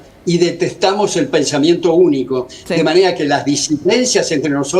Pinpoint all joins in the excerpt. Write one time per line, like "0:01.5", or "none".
none